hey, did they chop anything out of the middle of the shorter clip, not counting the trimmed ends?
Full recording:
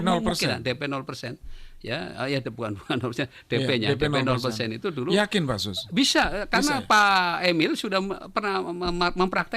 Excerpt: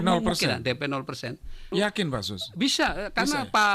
yes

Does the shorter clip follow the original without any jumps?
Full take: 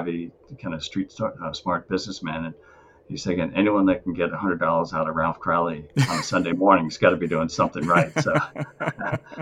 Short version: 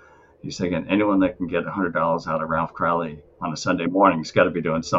yes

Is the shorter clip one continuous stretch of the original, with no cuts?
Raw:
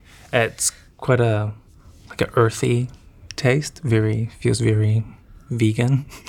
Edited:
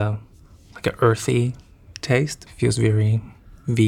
no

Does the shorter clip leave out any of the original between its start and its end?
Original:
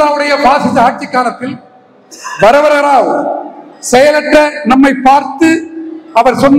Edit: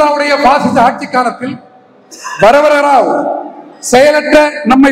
no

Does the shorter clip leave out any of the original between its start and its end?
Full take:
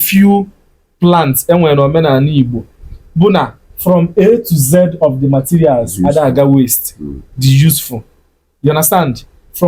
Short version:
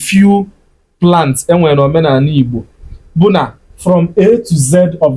no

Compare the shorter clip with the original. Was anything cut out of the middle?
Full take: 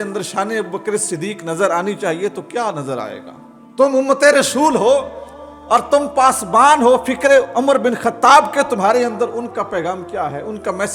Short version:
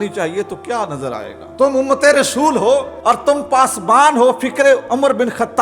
yes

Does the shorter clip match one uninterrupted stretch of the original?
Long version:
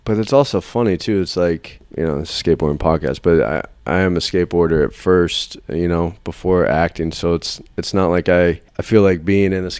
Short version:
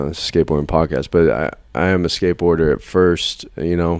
yes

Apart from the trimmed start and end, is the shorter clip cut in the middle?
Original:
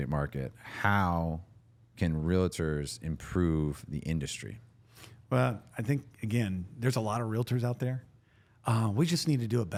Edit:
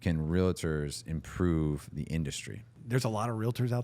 yes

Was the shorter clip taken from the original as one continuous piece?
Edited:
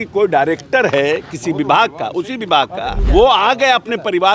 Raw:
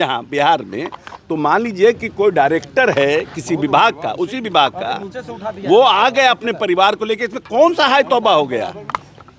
no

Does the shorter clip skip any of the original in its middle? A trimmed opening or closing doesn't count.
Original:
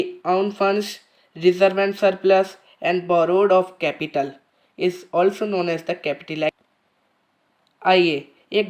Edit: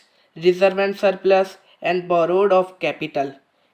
no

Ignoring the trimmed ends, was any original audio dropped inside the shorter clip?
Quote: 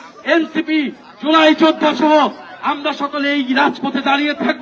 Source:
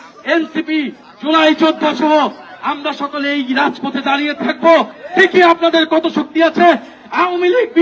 no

